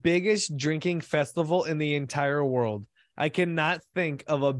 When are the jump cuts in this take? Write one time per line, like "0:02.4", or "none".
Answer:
none